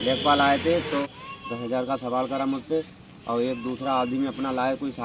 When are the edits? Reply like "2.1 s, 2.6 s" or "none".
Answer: 1.0 s